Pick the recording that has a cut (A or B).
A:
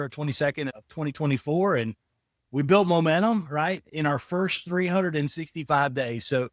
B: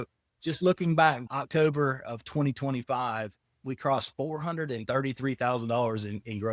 B